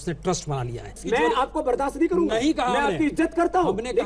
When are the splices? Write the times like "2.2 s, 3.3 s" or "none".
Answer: 1.0 s